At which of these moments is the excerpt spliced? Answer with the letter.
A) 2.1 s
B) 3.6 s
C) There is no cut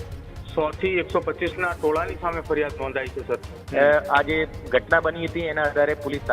B